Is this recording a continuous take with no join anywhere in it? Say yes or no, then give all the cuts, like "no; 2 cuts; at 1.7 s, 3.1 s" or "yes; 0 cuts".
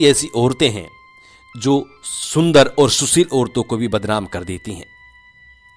yes; 0 cuts